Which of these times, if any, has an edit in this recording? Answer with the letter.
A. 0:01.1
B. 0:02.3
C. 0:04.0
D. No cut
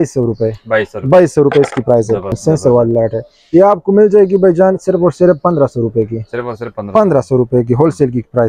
B